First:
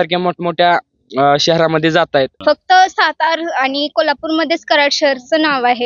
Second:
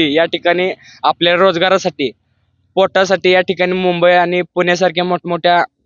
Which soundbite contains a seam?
first; 1 cut; at 2.3 s

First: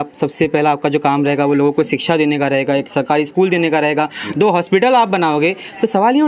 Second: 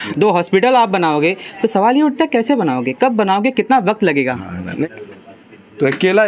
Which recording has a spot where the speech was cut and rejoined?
second; 1 cut; at 4.8 s

